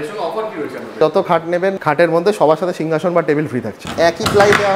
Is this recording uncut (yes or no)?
no